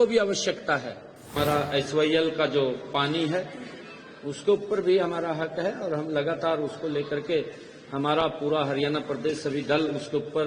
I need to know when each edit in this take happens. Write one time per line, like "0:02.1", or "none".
0:01.3